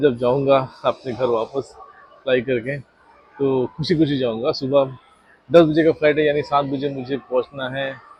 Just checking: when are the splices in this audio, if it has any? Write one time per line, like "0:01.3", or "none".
none

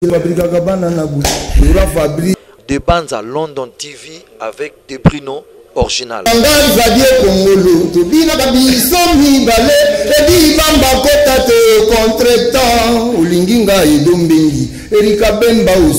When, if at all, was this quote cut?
0:02.3
0:06.3

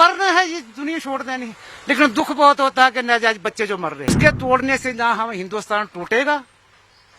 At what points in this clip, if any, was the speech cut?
0:04.2

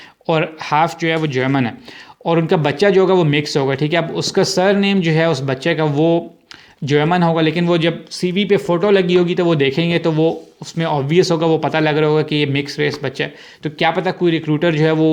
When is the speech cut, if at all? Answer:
none

